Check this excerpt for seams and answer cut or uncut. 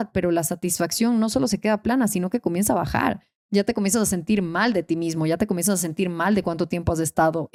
uncut